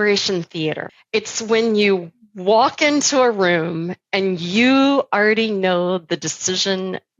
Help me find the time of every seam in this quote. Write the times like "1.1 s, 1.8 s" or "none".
0.9 s